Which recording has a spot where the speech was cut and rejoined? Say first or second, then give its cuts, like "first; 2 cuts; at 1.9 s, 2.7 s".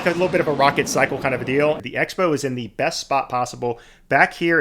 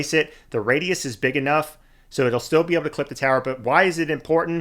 first; 1 cut; at 1.8 s